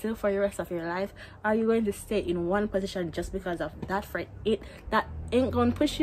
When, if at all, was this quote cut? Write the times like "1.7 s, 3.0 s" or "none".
none